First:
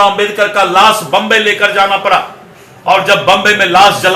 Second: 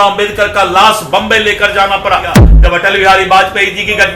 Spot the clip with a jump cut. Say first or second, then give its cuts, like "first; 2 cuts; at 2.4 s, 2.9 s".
second; 1 cut; at 2.5 s